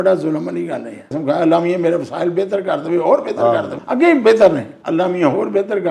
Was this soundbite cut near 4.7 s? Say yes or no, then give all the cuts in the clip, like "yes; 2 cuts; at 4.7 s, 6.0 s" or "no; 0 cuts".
yes; 3 cuts; at 1.1 s, 3.8 s, 4.7 s